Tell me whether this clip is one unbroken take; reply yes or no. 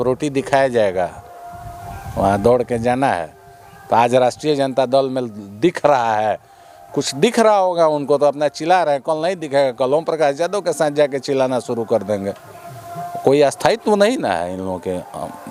yes